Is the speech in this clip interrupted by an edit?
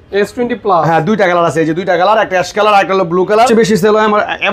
yes; 1 cut; at 3.5 s

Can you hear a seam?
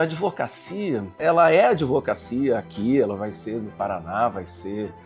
yes; 1 cut; at 1.2 s

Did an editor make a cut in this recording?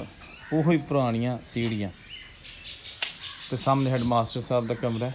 no; 0 cuts

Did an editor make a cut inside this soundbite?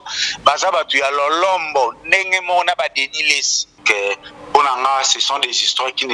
yes; 1 cut; at 3.7 s

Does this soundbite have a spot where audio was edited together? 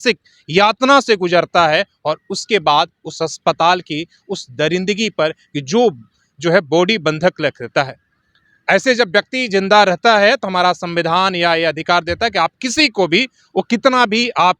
no; 0 cuts

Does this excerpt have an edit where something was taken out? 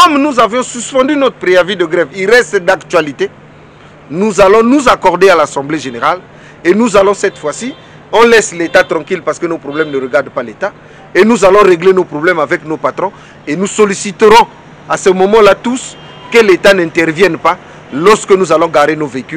no; 0 cuts

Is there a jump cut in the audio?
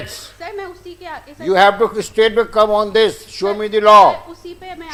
no; 0 cuts

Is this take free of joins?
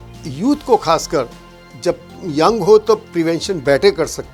yes; 0 cuts

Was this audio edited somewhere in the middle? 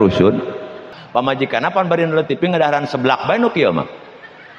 yes; 1 cut; at 1.0 s

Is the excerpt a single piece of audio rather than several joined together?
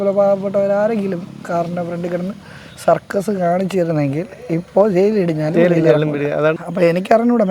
no; 1 cut; at 6.6 s

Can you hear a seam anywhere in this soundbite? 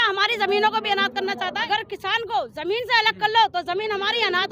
yes; 1 cut; at 1.4 s

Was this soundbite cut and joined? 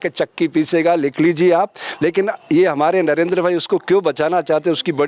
no; 0 cuts

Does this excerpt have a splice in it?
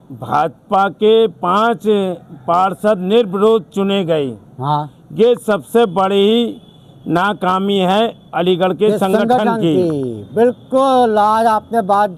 no; 0 cuts

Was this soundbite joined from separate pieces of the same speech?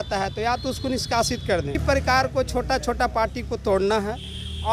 yes; 1 cut; at 1.8 s

